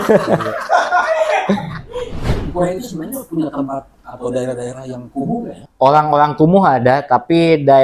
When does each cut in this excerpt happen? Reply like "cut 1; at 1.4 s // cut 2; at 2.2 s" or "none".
cut 1; at 2.4 s // cut 2; at 5.7 s